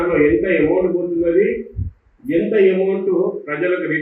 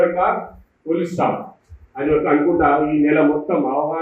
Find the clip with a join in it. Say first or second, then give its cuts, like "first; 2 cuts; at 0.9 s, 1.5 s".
second; 1 cut; at 2.9 s